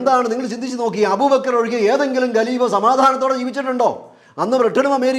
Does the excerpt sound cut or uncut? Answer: uncut